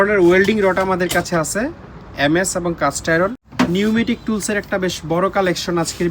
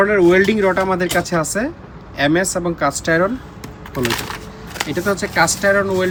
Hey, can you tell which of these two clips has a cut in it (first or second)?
first